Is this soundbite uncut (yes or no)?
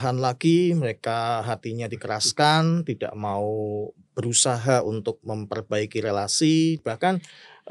no